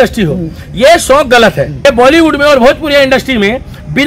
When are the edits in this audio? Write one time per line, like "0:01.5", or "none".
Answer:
0:01.7